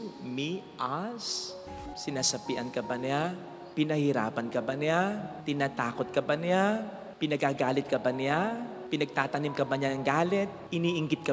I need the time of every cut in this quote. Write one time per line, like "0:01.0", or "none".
0:01.5